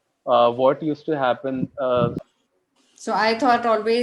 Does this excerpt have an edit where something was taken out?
yes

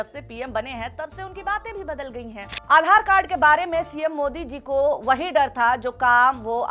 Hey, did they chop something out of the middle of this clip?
yes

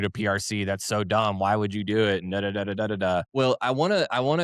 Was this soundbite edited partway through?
yes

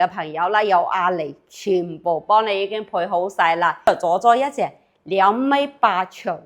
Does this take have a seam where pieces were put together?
yes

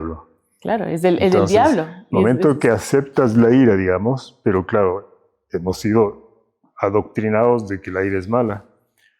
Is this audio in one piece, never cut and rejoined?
yes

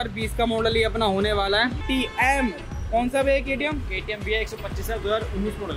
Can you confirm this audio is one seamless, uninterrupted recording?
no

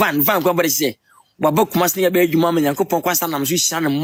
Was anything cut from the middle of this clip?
no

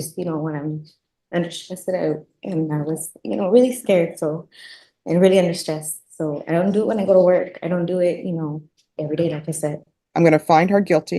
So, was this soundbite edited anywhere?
yes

